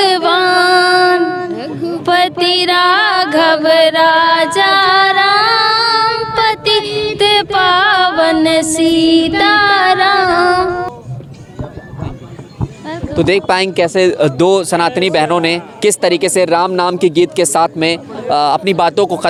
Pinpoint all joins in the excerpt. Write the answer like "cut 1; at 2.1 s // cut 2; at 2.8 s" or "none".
none